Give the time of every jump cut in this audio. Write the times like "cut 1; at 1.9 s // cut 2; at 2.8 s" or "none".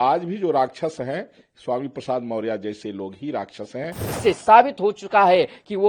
cut 1; at 4.0 s